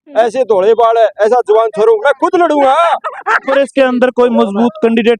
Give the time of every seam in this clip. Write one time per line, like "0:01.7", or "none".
0:03.5